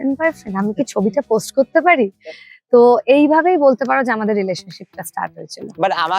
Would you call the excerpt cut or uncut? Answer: uncut